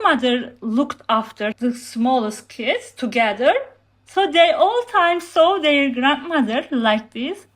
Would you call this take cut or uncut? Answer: cut